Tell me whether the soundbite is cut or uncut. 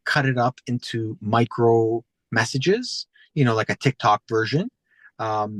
uncut